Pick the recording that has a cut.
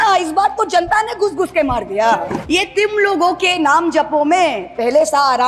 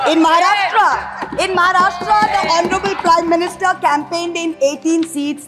first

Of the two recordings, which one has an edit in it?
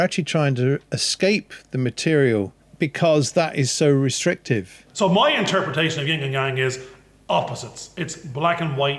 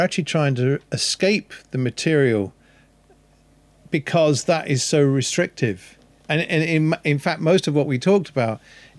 first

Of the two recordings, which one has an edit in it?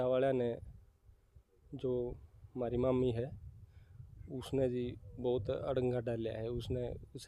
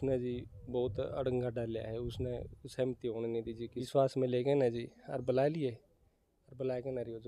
second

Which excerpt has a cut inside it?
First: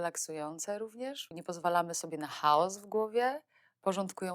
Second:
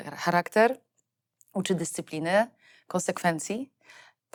first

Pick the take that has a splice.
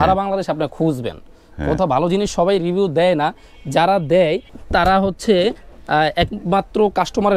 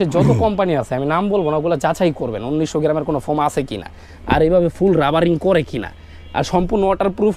first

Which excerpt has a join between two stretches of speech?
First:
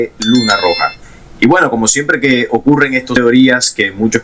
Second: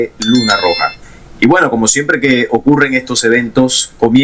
first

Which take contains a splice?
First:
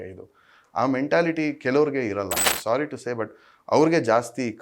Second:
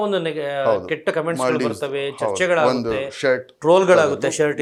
first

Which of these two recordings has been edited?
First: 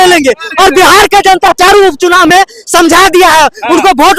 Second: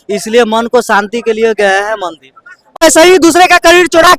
second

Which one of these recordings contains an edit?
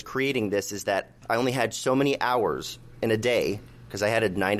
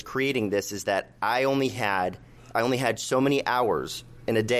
first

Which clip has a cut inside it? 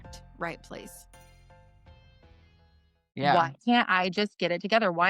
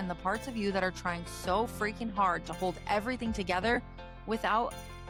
first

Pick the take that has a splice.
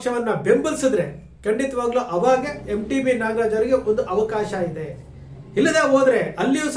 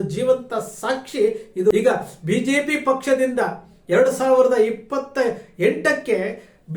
second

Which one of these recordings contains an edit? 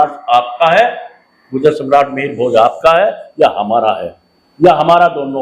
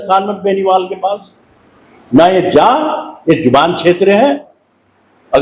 second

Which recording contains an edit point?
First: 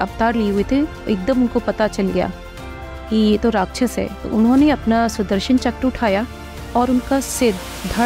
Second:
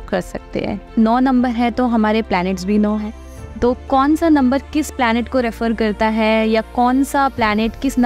second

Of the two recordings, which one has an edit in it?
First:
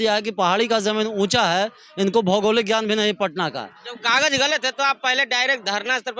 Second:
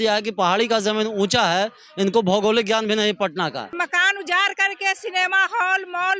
second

